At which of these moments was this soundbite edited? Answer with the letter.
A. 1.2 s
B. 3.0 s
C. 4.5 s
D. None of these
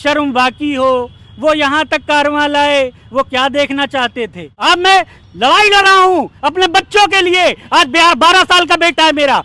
C